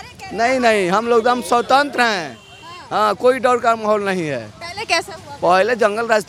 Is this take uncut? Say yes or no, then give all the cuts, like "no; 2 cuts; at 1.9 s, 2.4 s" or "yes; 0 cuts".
yes; 0 cuts